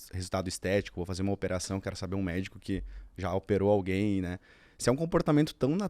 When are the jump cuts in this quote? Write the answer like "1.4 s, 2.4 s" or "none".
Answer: none